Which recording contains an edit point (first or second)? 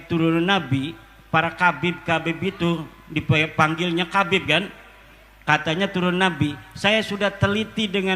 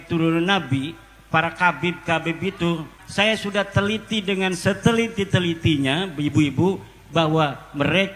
second